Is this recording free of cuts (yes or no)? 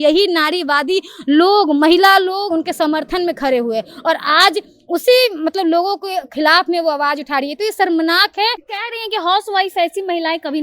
no